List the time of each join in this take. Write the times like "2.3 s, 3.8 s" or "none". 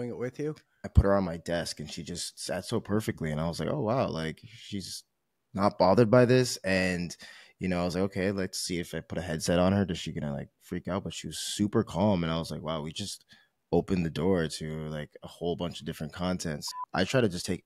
0.8 s, 16.6 s